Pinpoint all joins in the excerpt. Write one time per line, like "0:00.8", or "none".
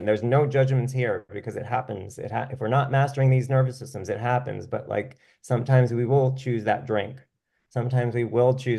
none